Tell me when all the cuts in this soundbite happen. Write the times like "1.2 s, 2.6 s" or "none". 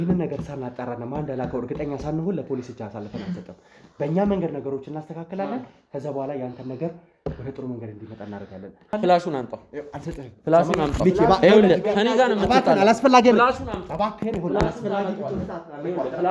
8.9 s